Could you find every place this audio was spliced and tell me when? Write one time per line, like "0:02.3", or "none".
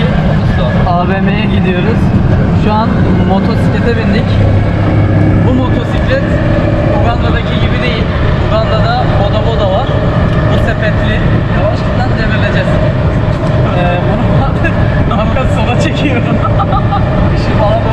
none